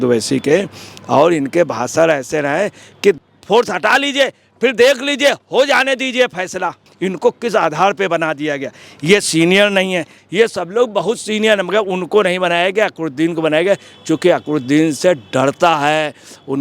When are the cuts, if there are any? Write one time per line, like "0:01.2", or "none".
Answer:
0:06.8
0:10.2